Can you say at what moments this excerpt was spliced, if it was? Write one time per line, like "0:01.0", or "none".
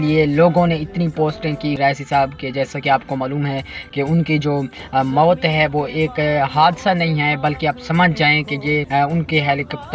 0:01.8
0:08.9